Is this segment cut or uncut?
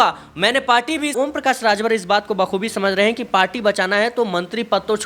cut